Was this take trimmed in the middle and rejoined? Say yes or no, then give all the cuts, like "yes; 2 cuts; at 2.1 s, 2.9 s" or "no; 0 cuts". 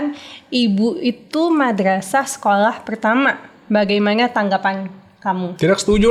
no; 0 cuts